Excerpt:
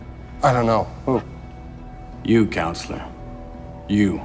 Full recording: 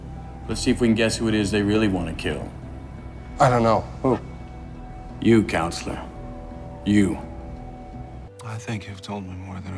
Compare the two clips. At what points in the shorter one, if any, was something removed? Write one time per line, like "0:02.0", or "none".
none